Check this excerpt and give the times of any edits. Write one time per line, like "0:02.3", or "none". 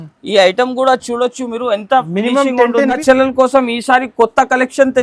0:03.0

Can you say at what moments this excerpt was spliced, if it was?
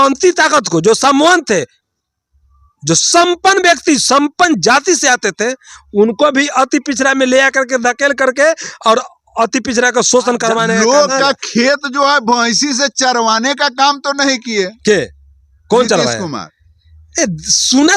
0:10.7

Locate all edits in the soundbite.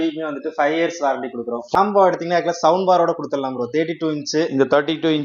0:01.8

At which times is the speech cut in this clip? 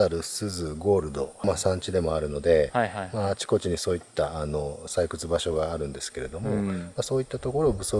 none

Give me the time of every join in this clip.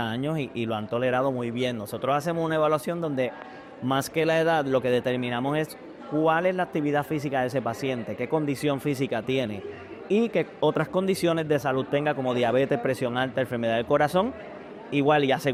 none

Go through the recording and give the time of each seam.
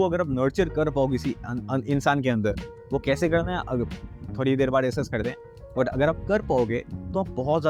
none

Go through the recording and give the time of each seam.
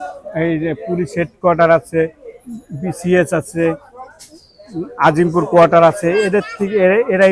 none

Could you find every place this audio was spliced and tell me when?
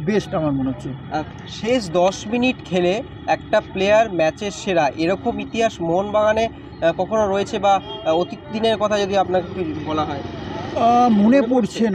none

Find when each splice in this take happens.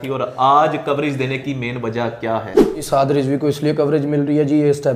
0:02.8

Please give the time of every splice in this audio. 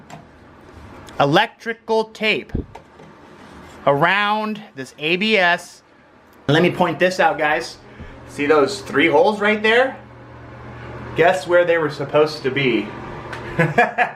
0:06.3

